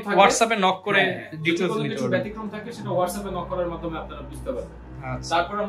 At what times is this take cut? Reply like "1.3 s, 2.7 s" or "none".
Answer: none